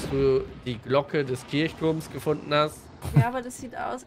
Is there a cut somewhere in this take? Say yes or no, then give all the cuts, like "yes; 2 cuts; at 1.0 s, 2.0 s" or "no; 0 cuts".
no; 0 cuts